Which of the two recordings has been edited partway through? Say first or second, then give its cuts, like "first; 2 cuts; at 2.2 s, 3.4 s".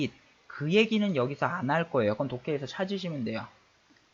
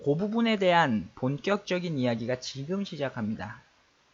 second; 1 cut; at 1.9 s